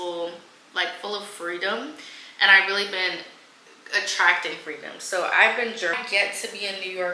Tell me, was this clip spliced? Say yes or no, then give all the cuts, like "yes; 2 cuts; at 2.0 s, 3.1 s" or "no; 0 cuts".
yes; 1 cut; at 6.0 s